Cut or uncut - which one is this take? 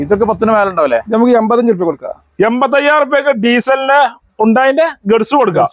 cut